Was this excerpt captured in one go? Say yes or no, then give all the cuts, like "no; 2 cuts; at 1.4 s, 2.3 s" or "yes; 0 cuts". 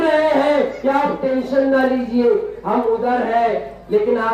yes; 0 cuts